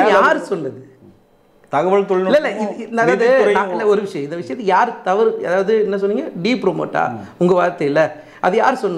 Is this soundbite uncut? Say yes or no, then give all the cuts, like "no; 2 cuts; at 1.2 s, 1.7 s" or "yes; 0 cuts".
yes; 0 cuts